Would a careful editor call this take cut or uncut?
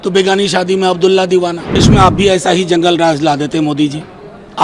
cut